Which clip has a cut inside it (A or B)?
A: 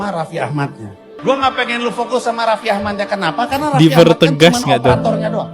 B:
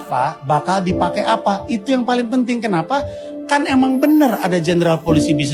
A